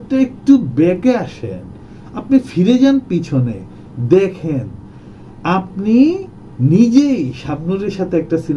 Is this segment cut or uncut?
uncut